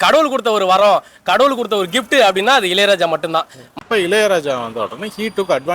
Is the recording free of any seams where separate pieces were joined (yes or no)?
no